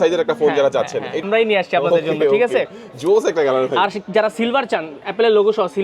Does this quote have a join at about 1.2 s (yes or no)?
yes